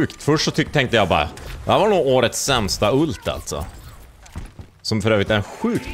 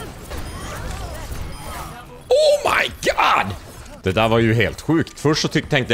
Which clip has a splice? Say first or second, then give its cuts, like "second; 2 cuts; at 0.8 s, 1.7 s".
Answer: second; 1 cut; at 3.5 s